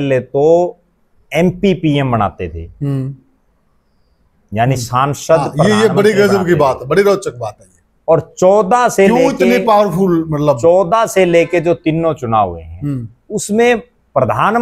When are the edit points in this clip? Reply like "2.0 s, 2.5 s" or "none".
none